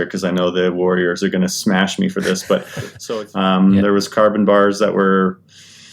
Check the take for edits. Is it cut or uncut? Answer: cut